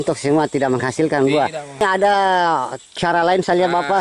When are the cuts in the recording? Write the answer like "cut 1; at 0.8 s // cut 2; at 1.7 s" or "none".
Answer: cut 1; at 1.8 s